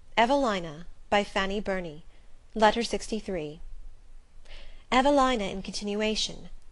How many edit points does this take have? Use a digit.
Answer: 1